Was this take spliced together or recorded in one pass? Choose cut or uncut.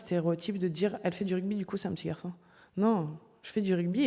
uncut